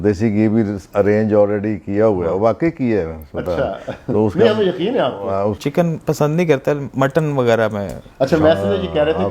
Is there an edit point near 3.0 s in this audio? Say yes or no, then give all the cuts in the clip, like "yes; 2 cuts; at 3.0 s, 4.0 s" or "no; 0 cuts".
no; 1 cut; at 5.6 s